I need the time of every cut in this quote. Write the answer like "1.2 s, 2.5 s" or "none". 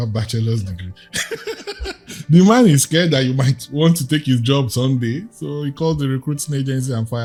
none